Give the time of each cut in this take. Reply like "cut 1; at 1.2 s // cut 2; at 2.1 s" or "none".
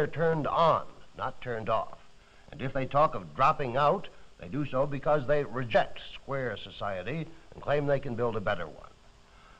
none

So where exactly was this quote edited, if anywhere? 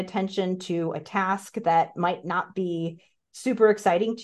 none

